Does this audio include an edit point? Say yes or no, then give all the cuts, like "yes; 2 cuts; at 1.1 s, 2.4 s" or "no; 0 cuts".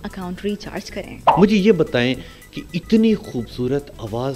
yes; 1 cut; at 1.2 s